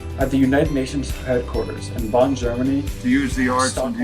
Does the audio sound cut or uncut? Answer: cut